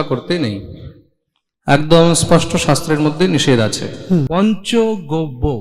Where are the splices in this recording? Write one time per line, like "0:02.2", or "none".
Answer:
0:04.3